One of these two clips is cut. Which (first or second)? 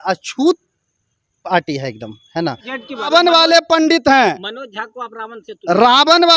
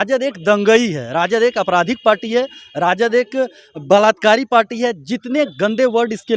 first